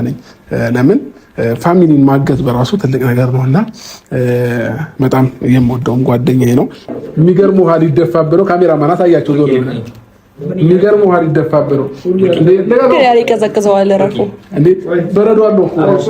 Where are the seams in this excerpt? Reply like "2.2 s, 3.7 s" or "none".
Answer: 6.9 s